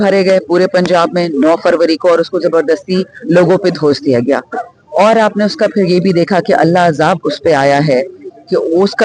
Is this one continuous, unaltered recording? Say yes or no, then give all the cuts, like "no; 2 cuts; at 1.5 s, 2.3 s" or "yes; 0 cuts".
yes; 0 cuts